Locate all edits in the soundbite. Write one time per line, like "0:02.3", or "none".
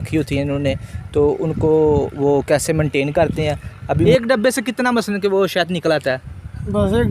0:04.0